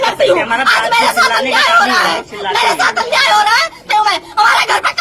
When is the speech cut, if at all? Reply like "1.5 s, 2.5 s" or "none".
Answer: none

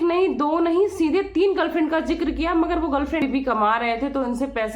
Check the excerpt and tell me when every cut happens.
3.2 s

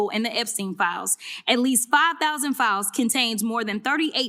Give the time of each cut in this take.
none

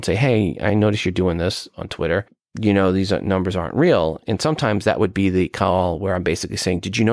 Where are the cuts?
2.4 s, 4.2 s

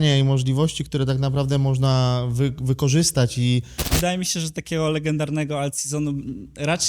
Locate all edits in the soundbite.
3.8 s

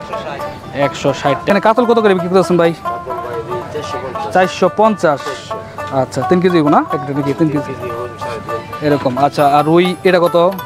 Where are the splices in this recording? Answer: 1.5 s

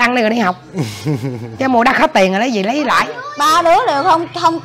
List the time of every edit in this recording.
3.2 s

